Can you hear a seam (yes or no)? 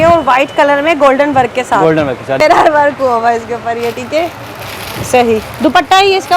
yes